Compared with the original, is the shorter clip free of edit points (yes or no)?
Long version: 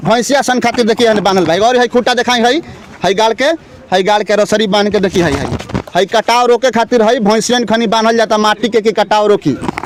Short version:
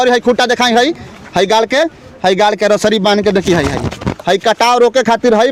yes